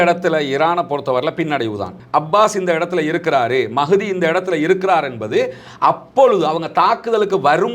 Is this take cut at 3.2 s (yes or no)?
no